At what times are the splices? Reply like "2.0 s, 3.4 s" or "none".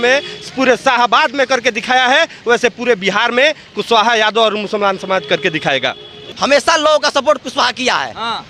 6.2 s